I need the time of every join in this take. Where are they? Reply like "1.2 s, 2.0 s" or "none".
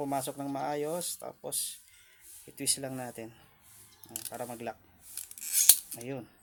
none